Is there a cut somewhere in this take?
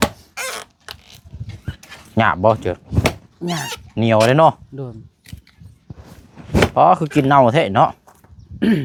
no; 0 cuts

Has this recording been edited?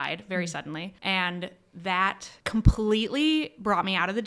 yes; 2 cuts; at 0.9 s, 2.3 s

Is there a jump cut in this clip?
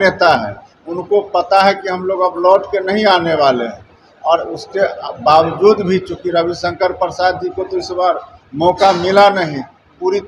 no; 0 cuts

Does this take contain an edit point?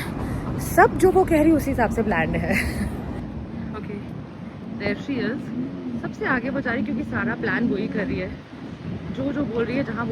no; 0 cuts

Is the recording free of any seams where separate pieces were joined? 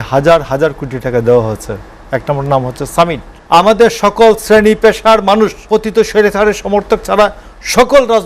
no; 2 cuts; at 3.3 s, 5.6 s

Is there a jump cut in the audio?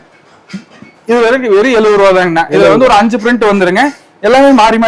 no; 0 cuts

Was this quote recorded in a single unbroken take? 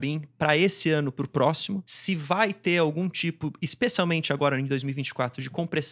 no; 1 cut; at 1.9 s

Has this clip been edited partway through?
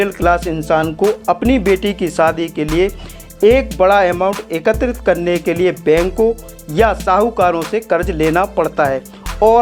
no; 0 cuts

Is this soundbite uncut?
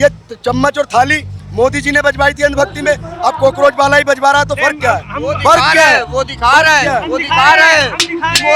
yes; 0 cuts

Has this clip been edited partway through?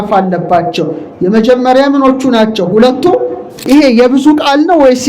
yes; 1 cut; at 3.5 s

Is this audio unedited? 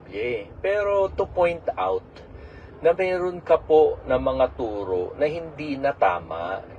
yes; 0 cuts

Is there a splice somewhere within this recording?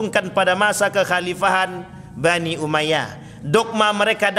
no; 0 cuts

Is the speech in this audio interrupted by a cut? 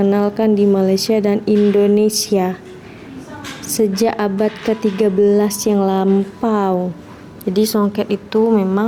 no; 0 cuts

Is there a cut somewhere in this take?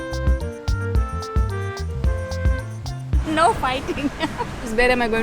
yes; 1 cut; at 3.2 s

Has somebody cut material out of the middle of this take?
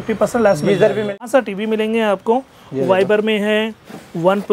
yes; 1 cut; at 1.2 s

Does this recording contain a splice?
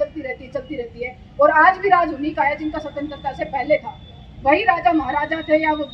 no; 0 cuts

